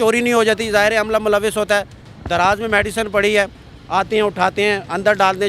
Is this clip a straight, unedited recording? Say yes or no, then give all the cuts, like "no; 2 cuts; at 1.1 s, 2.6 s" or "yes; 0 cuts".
yes; 0 cuts